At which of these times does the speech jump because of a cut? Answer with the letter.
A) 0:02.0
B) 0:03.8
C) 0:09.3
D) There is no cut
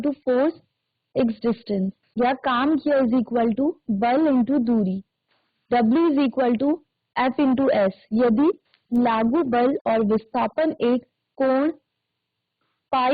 A